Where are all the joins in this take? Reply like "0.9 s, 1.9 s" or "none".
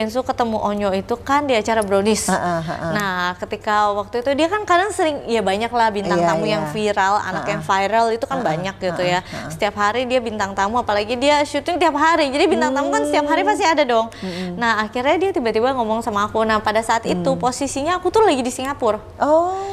none